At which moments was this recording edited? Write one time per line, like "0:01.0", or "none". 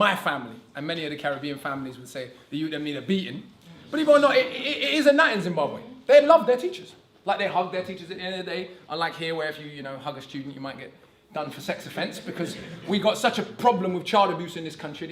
0:13.9